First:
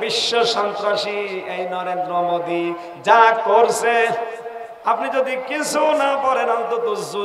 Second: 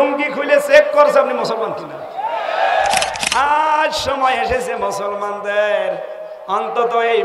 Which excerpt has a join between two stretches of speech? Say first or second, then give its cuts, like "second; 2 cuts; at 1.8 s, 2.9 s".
second; 1 cut; at 3.2 s